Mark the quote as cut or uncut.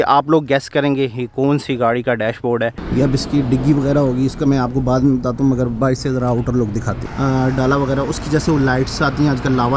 cut